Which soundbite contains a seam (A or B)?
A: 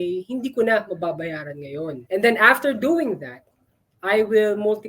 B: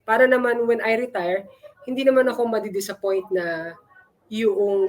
A